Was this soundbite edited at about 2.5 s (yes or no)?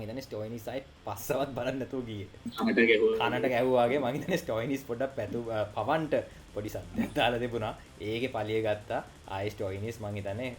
yes